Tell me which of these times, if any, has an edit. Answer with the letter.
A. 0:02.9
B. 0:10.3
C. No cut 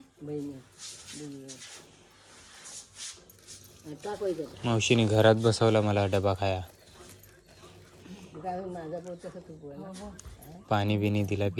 C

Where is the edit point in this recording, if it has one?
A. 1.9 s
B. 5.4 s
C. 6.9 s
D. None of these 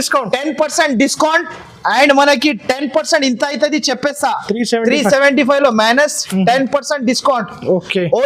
D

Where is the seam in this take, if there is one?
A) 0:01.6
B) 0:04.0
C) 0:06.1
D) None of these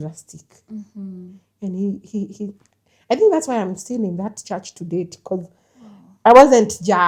D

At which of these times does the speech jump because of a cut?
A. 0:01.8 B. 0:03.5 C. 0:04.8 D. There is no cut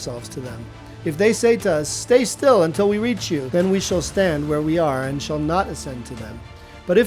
B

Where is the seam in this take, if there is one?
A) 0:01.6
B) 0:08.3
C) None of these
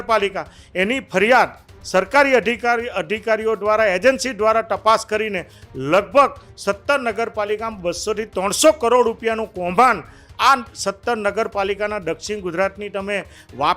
C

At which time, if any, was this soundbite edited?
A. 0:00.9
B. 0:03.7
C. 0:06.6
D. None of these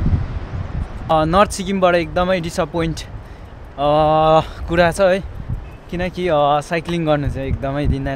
A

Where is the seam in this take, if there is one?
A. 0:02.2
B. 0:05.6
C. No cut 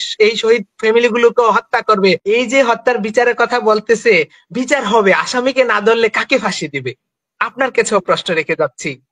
A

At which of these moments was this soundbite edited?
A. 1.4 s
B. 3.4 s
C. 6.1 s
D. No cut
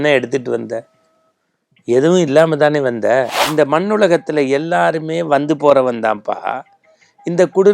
B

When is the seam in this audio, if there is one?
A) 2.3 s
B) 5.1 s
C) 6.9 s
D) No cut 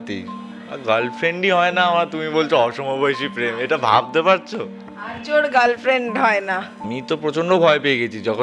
C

